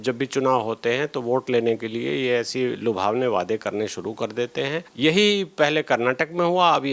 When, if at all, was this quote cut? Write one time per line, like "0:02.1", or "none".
0:04.9